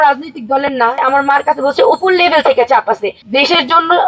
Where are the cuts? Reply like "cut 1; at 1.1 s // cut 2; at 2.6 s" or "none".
cut 1; at 1.0 s // cut 2; at 3.2 s